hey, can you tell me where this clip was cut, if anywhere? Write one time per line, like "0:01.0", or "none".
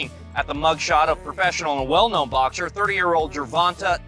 none